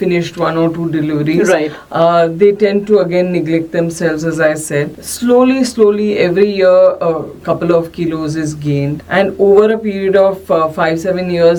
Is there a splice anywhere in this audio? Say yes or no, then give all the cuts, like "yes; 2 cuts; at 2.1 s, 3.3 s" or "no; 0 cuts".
no; 0 cuts